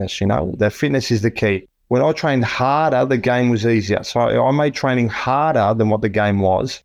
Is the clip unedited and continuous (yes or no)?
no